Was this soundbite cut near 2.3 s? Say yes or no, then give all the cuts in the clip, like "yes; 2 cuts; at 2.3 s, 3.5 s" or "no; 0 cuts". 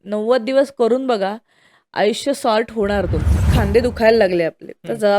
no; 1 cut; at 3.5 s